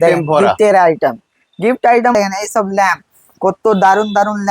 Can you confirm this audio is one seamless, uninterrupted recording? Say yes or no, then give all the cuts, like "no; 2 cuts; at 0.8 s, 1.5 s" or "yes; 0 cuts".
no; 1 cut; at 2.1 s